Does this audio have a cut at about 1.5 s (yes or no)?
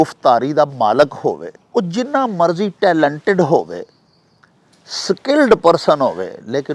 yes